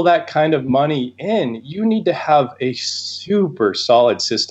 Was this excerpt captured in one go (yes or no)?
yes